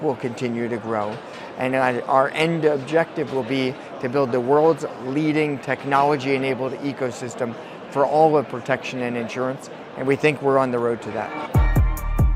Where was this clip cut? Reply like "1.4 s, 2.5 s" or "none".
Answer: 11.4 s